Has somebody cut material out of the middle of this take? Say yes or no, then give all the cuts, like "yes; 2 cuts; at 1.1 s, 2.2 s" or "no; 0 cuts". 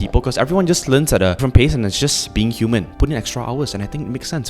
yes; 2 cuts; at 1.4 s, 2.9 s